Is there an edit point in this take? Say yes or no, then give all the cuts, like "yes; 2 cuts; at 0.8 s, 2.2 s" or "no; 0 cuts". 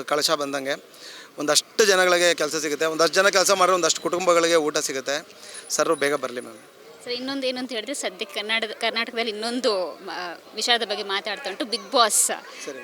no; 0 cuts